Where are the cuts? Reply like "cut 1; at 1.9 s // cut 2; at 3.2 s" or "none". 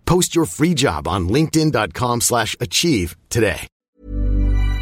cut 1; at 3.8 s